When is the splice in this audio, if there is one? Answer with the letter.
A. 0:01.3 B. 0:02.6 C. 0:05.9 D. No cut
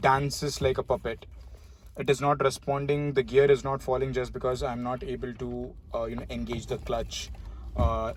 D